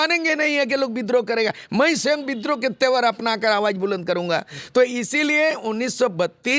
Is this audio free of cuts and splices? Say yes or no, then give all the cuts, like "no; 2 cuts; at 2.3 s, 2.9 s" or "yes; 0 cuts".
yes; 0 cuts